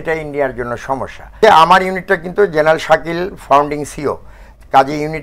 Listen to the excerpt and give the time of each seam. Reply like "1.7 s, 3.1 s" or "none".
1.4 s

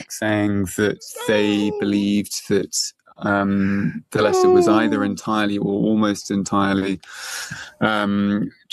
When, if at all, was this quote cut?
none

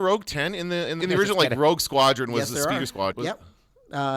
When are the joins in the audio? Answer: 1.0 s, 3.1 s

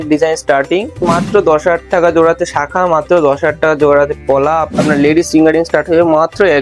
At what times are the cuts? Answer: 1.1 s, 4.7 s

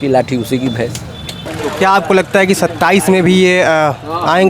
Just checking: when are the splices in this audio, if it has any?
1.5 s

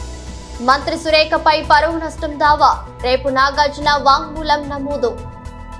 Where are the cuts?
none

